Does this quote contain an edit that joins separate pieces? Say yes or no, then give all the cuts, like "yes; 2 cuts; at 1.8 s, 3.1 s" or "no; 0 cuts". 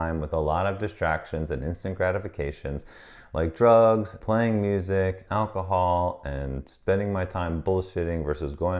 yes; 2 cuts; at 4.1 s, 5.2 s